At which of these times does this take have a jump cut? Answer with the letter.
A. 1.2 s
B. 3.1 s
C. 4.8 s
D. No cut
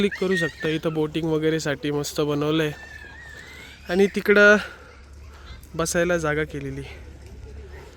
D